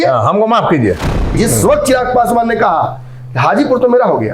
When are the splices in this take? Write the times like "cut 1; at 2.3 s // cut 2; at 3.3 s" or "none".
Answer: cut 1; at 1.2 s